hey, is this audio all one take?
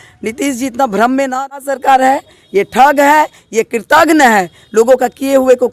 no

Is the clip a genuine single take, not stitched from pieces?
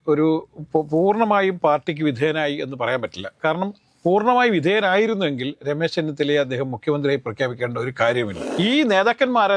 no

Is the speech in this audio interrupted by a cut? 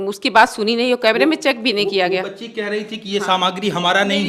no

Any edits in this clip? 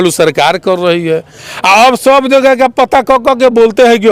no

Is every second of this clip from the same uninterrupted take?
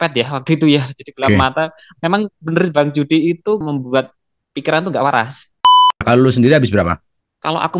no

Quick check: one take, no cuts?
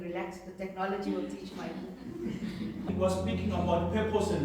no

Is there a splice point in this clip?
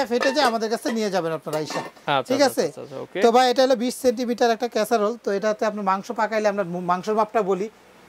no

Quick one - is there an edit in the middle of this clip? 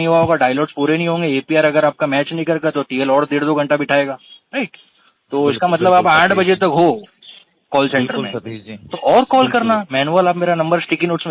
no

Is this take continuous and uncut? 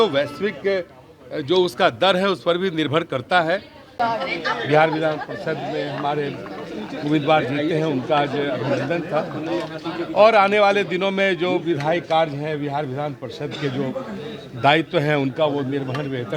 no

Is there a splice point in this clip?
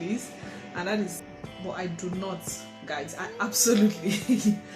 yes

